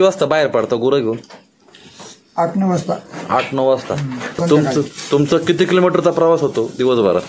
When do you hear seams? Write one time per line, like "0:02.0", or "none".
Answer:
0:04.4